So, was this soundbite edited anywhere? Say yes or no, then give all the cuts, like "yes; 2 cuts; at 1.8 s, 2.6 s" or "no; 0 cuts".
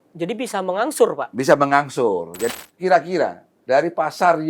yes; 2 cuts; at 2.5 s, 3.5 s